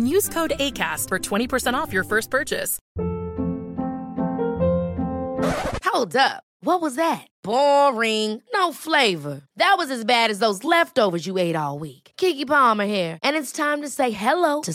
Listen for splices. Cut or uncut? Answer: cut